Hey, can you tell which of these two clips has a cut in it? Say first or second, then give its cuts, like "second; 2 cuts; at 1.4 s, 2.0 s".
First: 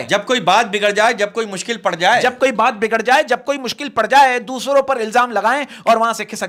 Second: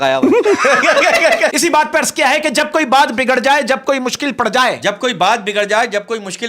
second; 1 cut; at 1.5 s